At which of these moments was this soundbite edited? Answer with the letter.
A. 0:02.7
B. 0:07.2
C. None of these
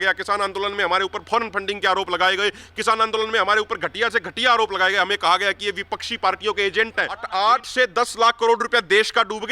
B